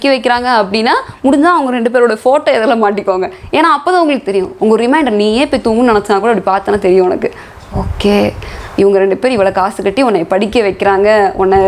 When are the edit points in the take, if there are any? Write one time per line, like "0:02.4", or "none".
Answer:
none